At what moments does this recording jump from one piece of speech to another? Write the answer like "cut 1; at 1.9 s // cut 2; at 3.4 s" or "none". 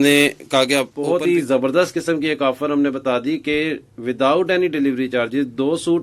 cut 1; at 1.0 s